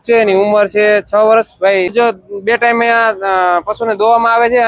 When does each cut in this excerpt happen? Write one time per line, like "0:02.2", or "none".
0:01.9